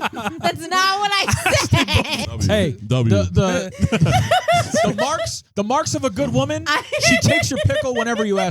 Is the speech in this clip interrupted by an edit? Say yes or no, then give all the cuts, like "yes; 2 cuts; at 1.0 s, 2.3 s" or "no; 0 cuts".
yes; 1 cut; at 2.2 s